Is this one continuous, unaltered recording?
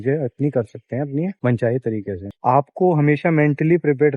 no; 1 cut; at 2.3 s

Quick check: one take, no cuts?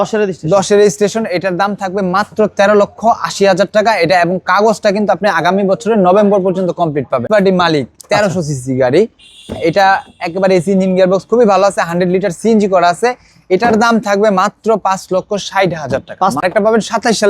no; 2 cuts; at 7.2 s, 16.4 s

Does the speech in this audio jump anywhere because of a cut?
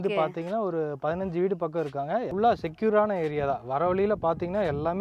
yes; 1 cut; at 2.3 s

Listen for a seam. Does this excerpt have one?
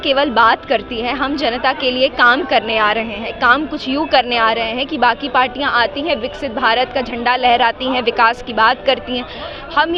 no; 0 cuts

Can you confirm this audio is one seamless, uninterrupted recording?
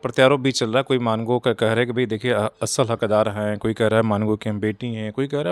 yes; 0 cuts

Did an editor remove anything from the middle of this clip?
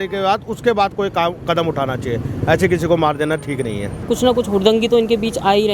yes; 1 cut; at 4.0 s

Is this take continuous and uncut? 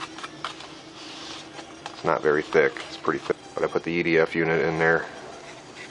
yes; 0 cuts

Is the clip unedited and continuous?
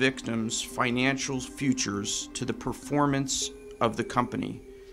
yes; 0 cuts

